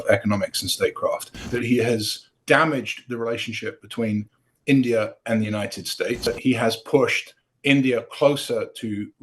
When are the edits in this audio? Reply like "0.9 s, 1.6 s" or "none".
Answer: 1.5 s, 6.3 s

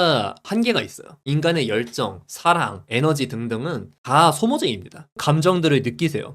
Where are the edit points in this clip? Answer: 5.1 s

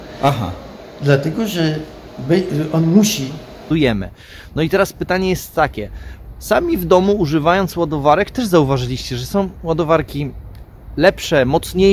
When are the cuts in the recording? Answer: 3.7 s

